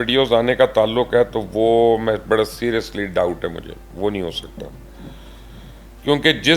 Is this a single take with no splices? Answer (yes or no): yes